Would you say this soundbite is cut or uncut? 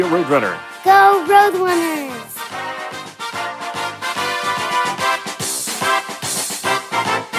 uncut